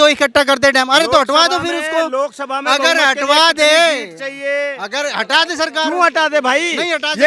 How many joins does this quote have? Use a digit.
0